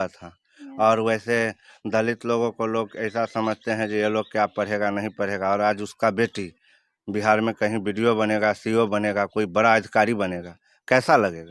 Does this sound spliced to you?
no; 0 cuts

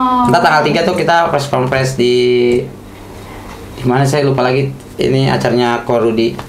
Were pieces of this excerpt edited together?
no; 0 cuts

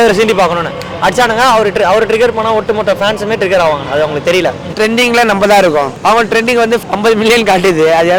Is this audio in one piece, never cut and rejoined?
no; 3 cuts; at 4.7 s, 5.9 s, 6.9 s

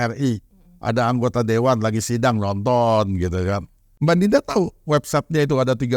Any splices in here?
yes; 1 cut; at 4.0 s

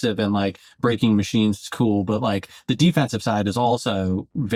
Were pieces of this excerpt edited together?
no; 0 cuts

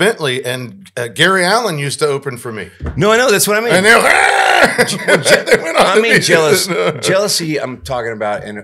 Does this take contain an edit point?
no; 0 cuts

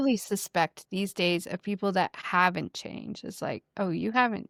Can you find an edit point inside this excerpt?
no; 0 cuts

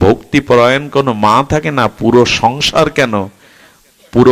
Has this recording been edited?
no; 0 cuts

